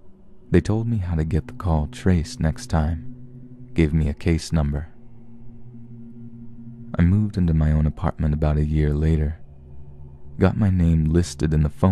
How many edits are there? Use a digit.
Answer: 1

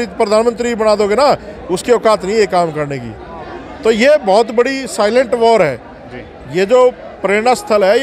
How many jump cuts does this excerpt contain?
0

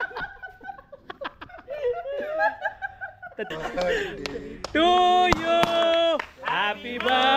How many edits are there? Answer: 1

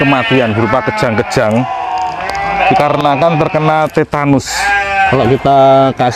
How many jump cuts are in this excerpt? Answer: 1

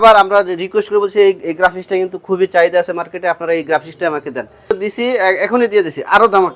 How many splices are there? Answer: 1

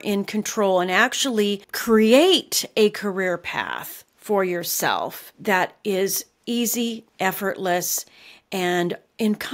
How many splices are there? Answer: 1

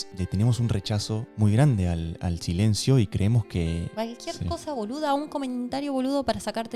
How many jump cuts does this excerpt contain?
1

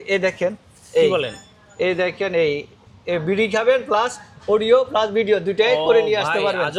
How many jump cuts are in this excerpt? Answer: 0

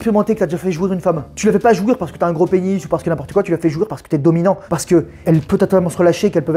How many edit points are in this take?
2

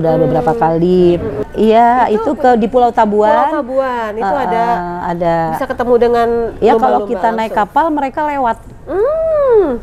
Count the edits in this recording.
1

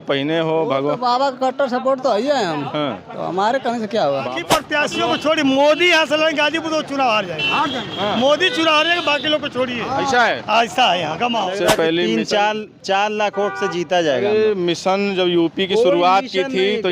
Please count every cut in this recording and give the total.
2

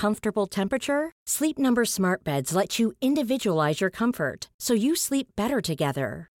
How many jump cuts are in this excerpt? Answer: 0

